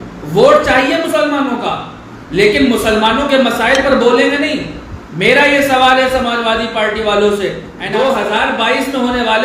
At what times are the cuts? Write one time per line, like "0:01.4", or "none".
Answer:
0:07.7